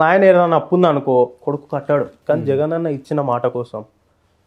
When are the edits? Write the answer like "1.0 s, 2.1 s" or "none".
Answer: 2.1 s